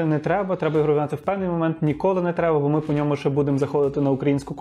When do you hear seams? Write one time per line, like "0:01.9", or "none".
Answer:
none